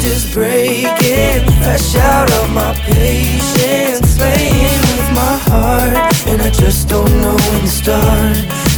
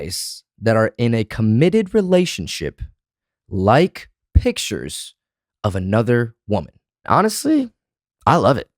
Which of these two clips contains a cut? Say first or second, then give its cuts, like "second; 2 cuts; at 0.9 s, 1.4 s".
second; 1 cut; at 7.0 s